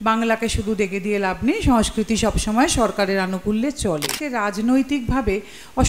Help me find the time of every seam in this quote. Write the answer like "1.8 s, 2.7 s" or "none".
4.2 s